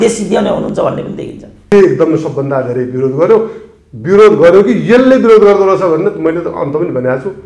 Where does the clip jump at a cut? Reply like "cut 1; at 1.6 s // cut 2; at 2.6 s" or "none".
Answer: cut 1; at 1.7 s